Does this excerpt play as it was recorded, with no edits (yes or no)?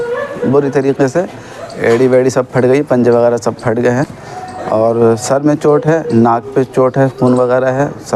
yes